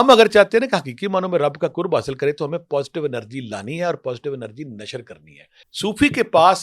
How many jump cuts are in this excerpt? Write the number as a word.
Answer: one